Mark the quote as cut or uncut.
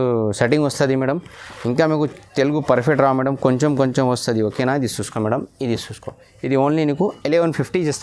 uncut